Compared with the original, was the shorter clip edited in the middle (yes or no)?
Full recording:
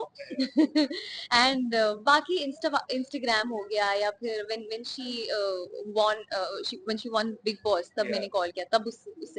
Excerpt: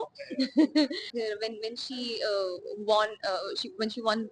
yes